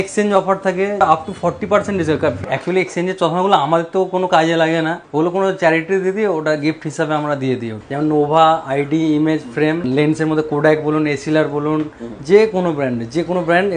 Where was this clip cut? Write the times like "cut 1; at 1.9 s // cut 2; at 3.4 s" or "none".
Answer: cut 1; at 1.0 s // cut 2; at 2.4 s // cut 3; at 5.0 s // cut 4; at 7.8 s // cut 5; at 9.8 s